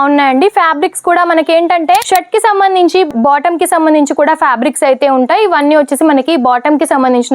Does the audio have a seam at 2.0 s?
yes; 1 cut; at 2.0 s

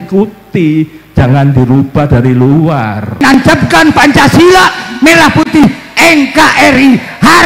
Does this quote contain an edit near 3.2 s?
yes; 1 cut; at 3.2 s

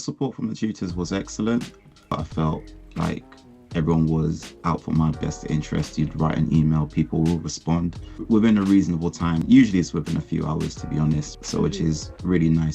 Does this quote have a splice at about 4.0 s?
no; 4 cuts; at 2.1 s, 8.2 s, 9.4 s, 11.3 s

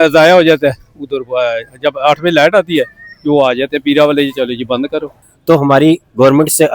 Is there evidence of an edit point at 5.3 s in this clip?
yes; 1 cut; at 5.3 s

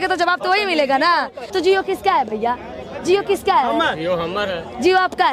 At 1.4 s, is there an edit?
yes; 1 cut; at 1.4 s

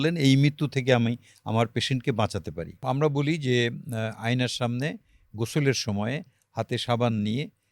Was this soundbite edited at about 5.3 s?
no; 1 cut; at 2.8 s

